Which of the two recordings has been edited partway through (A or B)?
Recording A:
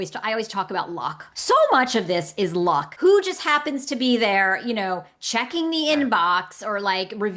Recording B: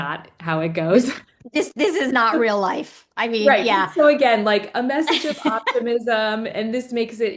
A